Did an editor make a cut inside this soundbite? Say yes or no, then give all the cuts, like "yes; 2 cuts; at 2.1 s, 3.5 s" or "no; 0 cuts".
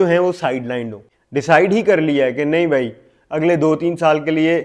yes; 1 cut; at 1.2 s